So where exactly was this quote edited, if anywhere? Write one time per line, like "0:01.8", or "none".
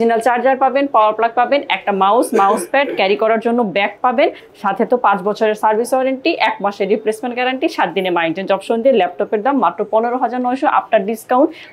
none